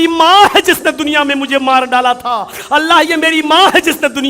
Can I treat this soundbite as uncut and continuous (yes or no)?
yes